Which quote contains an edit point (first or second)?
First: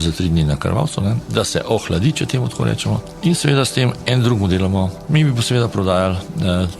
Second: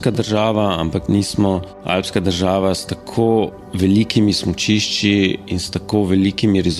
second